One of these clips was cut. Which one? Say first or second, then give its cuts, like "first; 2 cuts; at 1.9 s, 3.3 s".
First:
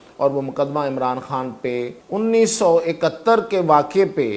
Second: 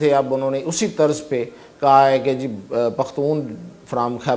first; 1 cut; at 2.0 s